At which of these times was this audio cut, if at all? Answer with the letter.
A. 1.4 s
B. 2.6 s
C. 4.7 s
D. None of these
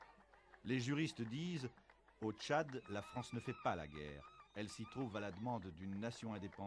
C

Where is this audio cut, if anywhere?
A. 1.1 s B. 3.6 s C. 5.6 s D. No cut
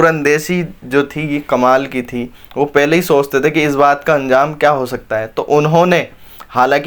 D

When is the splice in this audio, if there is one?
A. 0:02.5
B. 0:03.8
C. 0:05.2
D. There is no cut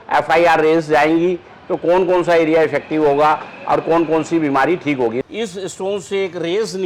C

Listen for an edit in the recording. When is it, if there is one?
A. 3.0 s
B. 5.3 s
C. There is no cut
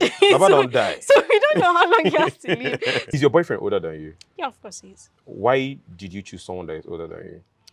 A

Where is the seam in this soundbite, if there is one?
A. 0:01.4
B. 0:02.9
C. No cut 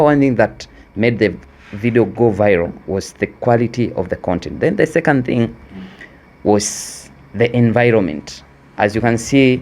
A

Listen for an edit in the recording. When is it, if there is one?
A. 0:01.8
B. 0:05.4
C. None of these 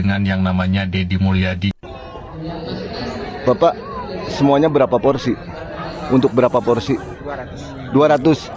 A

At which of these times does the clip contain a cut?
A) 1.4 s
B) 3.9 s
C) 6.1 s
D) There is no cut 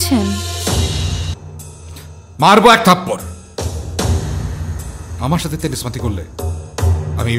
A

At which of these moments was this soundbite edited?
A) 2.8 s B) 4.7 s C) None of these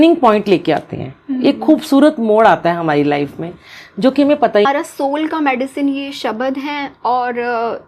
B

